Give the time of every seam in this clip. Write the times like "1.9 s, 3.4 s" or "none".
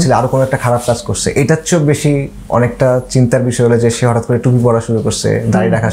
none